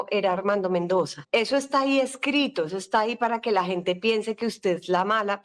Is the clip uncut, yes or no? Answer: no